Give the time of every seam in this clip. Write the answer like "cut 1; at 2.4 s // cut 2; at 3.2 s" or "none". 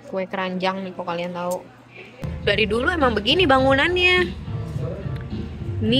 cut 1; at 2.3 s